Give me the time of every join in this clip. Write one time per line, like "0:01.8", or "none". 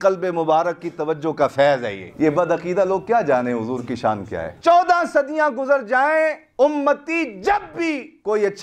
0:02.0
0:04.5
0:06.4